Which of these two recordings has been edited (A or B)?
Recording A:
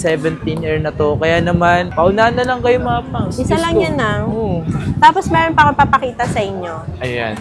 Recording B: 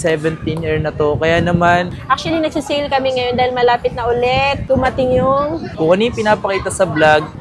B